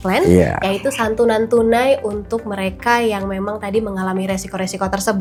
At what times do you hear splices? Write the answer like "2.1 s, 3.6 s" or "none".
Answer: none